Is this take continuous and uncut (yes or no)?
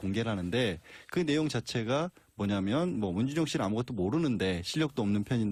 yes